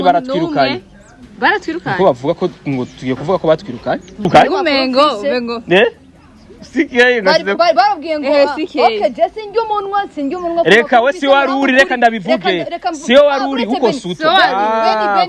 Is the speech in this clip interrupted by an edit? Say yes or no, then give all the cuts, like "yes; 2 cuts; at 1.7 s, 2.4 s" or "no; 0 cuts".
no; 0 cuts